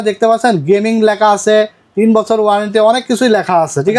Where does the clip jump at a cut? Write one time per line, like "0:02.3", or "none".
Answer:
none